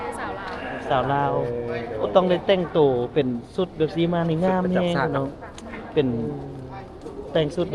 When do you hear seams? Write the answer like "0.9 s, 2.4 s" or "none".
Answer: none